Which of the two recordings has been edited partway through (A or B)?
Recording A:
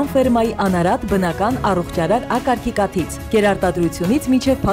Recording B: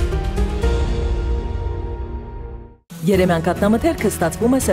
B